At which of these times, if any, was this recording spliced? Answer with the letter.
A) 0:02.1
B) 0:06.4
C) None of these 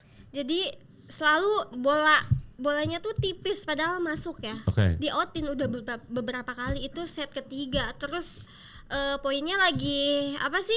C